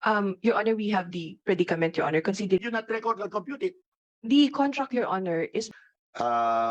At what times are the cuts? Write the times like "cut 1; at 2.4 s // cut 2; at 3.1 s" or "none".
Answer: cut 1; at 2.6 s // cut 2; at 5.7 s